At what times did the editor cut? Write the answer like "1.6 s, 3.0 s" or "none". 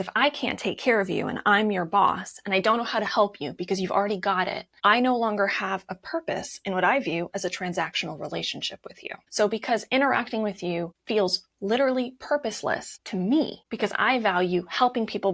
9.2 s, 10.9 s, 13.0 s, 13.6 s